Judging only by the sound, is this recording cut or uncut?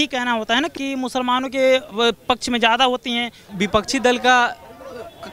cut